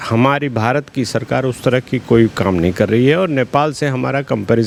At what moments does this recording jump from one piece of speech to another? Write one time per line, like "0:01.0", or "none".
none